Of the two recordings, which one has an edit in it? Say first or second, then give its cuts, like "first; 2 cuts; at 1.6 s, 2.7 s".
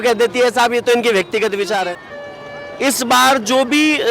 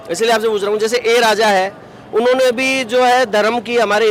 first; 1 cut; at 2.0 s